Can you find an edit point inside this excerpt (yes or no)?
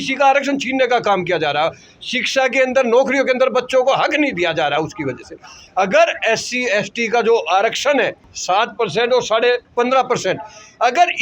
yes